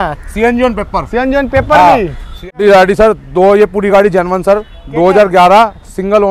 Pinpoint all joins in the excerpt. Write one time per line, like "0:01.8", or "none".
0:02.6

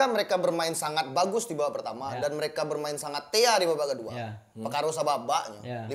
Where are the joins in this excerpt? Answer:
none

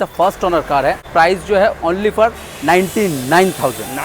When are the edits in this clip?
0:01.0

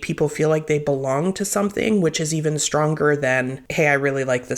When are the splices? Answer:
0:03.6

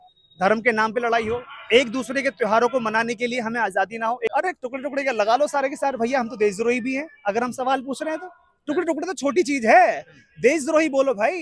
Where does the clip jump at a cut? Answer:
0:04.3

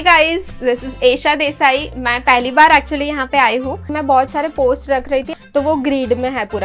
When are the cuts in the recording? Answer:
0:03.8
0:05.3

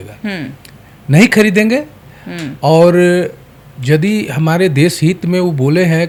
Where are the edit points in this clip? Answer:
none

